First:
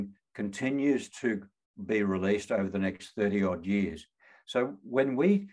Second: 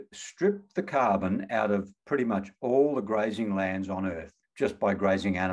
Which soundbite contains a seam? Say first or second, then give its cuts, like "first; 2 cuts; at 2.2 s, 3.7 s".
second; 1 cut; at 4.4 s